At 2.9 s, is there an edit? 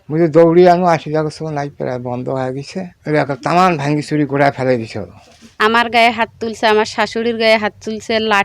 yes; 2 cuts; at 2.9 s, 5.4 s

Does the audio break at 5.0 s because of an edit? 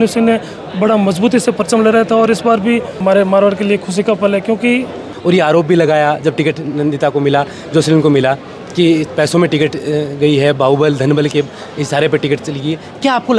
yes; 2 cuts; at 3.0 s, 5.0 s

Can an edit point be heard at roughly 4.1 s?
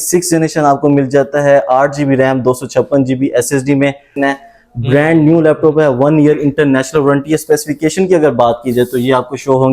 yes; 1 cut; at 4.1 s

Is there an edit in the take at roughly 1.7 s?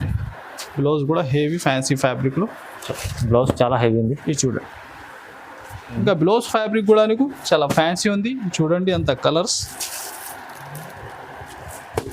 no; 1 cut; at 6.0 s

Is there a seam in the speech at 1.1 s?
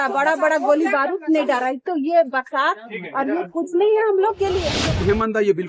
no; 1 cut; at 4.7 s

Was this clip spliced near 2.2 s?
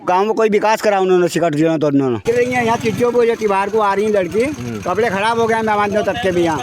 yes; 1 cut; at 2.2 s

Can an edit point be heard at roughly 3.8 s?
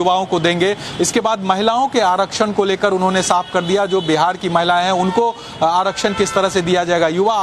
yes; 1 cut; at 3.8 s

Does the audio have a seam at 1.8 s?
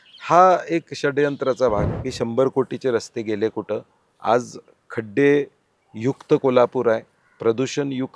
yes; 1 cut; at 1.8 s

